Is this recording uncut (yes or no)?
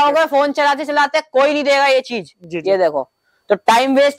yes